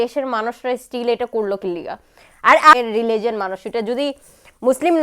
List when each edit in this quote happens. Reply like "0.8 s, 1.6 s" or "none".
2.7 s